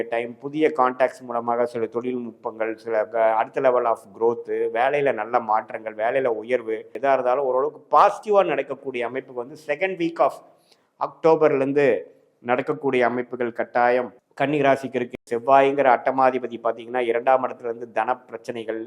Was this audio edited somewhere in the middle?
yes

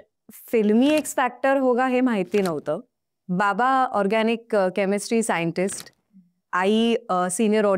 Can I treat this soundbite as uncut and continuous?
yes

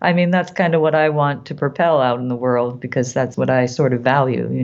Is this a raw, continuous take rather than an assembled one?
no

